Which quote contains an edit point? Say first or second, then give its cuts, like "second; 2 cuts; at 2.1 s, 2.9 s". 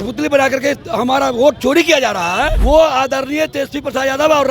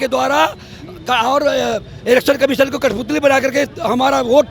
first; 1 cut; at 2.6 s